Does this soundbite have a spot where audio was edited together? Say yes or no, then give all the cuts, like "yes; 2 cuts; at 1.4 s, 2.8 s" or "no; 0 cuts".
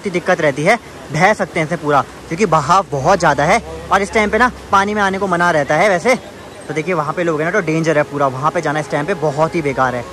no; 0 cuts